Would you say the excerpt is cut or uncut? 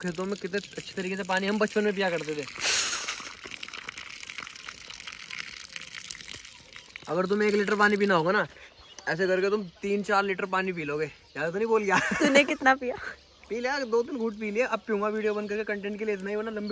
uncut